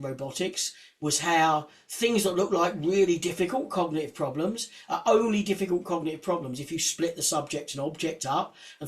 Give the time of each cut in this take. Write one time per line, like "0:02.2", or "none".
none